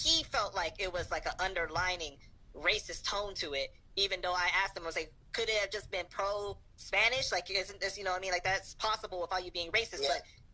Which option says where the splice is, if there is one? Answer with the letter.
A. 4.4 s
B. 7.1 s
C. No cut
C